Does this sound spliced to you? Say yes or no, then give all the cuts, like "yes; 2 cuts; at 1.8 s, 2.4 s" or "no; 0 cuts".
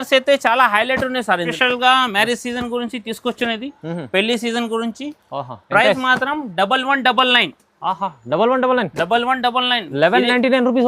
yes; 1 cut; at 1.5 s